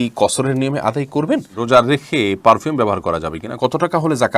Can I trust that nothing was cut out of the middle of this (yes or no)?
no